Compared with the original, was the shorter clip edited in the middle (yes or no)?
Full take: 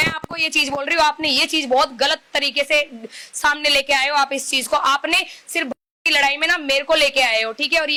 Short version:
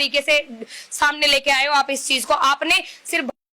no